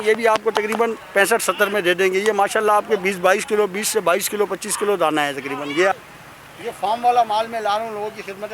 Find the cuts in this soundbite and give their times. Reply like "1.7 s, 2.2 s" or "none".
5.9 s

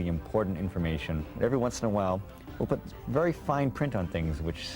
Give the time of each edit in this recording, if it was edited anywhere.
1.3 s

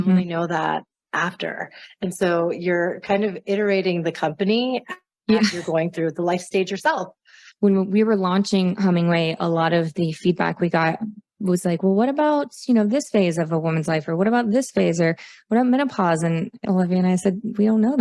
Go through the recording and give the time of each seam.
7.4 s, 16.6 s

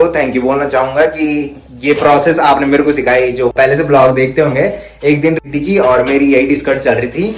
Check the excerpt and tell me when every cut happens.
none

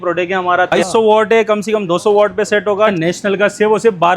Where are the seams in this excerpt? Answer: 0.7 s, 3.0 s

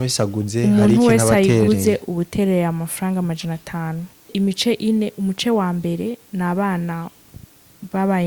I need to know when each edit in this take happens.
4.3 s

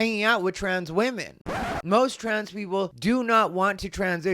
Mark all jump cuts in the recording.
1.5 s

